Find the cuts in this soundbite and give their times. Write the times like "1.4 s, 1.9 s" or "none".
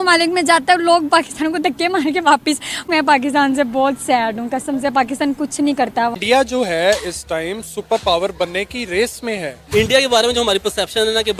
2.8 s, 6.2 s, 9.7 s